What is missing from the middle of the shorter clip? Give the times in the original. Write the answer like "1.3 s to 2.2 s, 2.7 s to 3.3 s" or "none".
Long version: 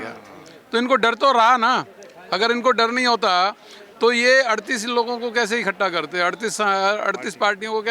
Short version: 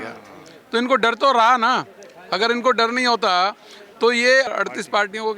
4.5 s to 7.0 s